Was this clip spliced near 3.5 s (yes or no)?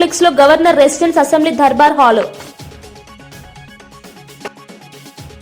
no